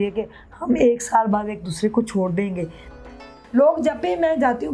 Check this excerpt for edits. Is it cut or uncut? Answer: cut